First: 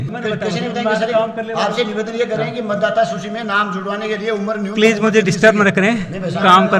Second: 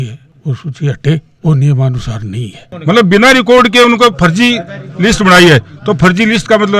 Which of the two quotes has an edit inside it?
second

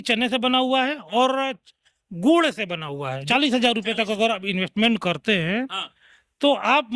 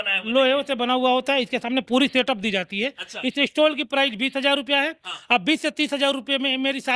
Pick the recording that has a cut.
first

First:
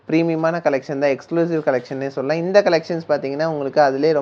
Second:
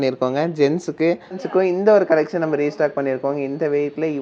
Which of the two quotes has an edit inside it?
second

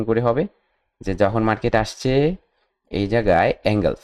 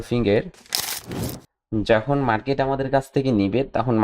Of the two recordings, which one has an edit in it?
second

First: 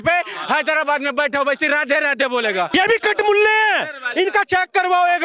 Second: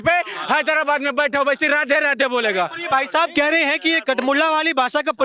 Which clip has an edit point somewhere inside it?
first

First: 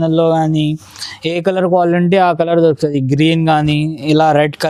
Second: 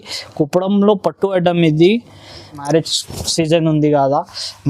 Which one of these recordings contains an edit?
second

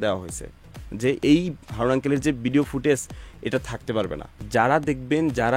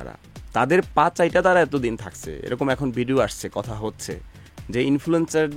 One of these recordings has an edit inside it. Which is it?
first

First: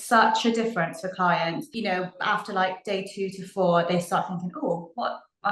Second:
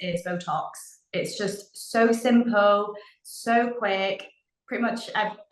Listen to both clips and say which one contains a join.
first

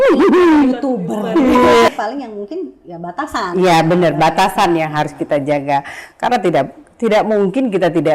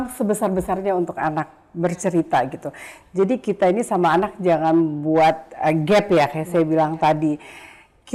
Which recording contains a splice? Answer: first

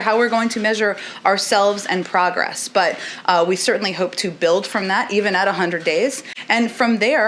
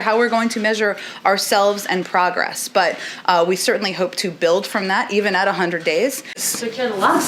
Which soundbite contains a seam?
second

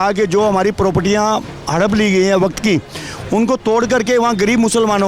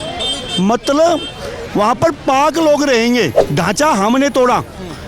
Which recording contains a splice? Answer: second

